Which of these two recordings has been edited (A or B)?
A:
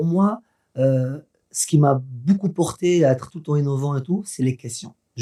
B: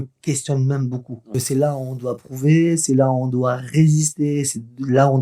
B